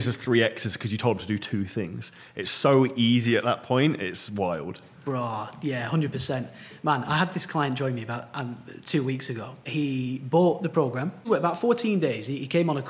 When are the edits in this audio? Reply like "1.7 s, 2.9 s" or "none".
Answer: 9.6 s, 11.3 s